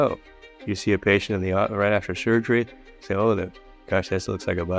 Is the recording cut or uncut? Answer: uncut